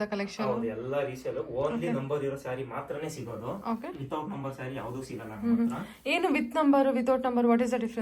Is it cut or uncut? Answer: uncut